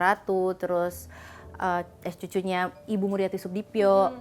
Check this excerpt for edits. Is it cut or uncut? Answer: uncut